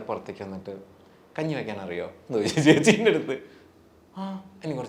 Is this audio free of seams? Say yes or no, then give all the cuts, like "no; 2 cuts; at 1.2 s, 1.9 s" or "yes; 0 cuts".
yes; 0 cuts